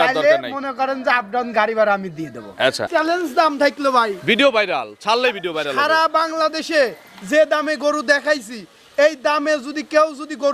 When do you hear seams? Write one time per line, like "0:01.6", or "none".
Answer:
0:02.9